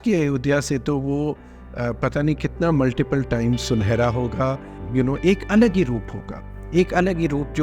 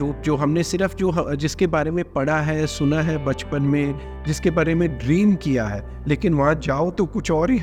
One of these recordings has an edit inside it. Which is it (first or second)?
first